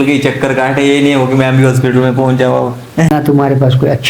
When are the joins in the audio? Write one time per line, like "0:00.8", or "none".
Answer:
0:03.1